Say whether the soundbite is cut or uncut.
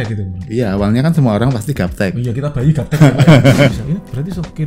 cut